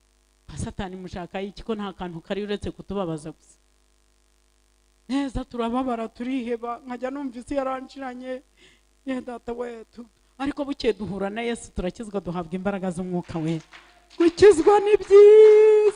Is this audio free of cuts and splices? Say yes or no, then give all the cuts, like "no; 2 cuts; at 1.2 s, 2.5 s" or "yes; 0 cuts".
yes; 0 cuts